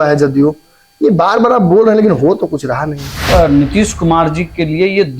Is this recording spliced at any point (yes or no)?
yes